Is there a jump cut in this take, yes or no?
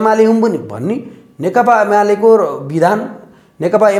no